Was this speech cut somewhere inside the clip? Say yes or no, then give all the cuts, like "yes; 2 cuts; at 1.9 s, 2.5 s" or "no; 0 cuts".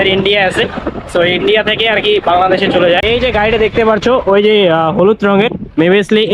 no; 0 cuts